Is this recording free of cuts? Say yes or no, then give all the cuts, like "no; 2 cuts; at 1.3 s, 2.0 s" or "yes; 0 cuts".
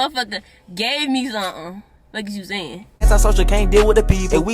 no; 1 cut; at 3.0 s